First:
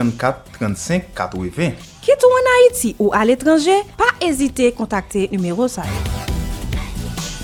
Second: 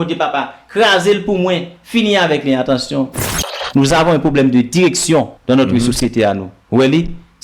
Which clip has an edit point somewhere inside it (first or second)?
second